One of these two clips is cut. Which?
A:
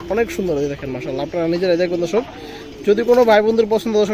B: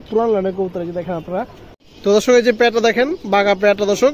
B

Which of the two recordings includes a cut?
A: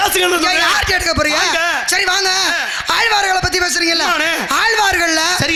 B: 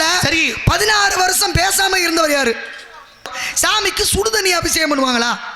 B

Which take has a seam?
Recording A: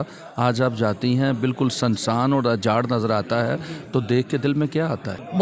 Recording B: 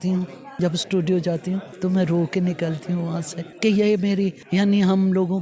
B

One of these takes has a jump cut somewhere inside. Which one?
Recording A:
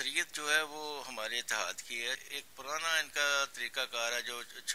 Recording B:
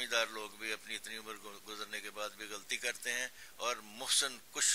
A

